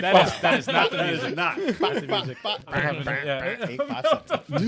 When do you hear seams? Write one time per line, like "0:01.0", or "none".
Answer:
0:02.6